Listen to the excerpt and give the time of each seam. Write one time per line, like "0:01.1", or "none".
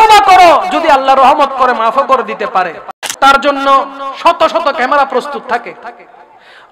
0:03.0